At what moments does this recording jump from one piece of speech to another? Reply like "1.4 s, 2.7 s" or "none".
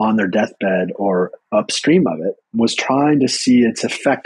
2.6 s